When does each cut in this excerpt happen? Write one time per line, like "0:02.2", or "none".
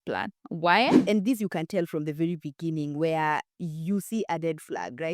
0:01.0